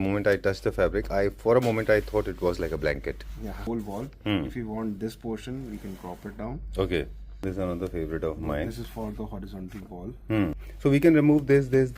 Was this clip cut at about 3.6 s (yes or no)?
yes